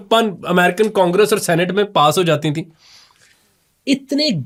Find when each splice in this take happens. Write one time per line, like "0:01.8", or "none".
none